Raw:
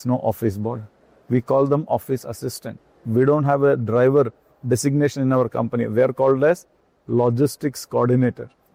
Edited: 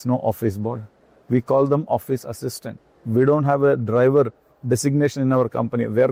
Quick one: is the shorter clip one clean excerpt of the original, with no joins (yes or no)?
yes